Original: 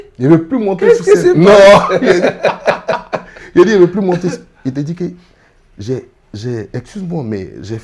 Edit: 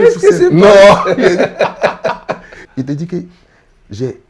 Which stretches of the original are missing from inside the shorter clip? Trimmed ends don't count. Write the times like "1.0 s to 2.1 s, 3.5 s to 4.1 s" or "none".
3.4 s to 4.4 s